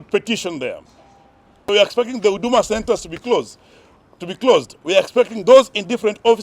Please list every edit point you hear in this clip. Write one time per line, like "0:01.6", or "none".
0:01.6